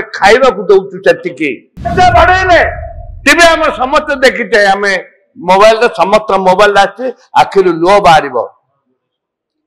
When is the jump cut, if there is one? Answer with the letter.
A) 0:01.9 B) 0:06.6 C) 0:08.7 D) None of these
A